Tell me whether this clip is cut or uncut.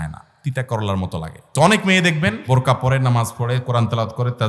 cut